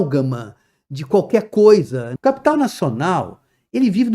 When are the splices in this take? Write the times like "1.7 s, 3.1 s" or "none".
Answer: 2.1 s